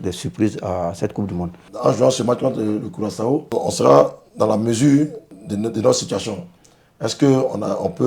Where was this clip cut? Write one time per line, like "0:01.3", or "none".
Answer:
0:01.6
0:03.5
0:05.3